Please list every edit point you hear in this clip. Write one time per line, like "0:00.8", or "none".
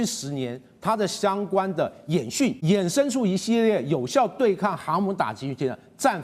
0:02.6